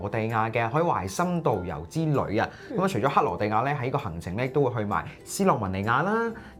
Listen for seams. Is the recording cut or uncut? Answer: uncut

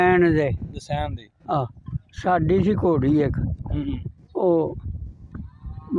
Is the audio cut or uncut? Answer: cut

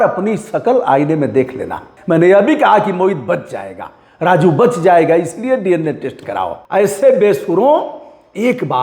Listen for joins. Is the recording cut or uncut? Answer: cut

